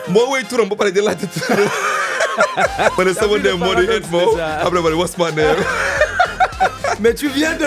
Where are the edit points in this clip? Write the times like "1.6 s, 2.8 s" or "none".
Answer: 2.9 s, 6.8 s